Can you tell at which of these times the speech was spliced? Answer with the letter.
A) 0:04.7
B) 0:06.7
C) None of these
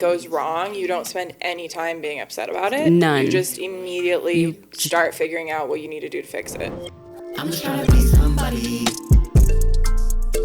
B